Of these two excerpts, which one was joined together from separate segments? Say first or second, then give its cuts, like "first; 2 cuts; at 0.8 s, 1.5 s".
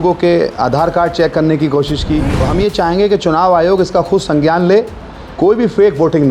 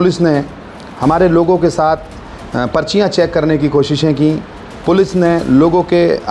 first; 1 cut; at 2.4 s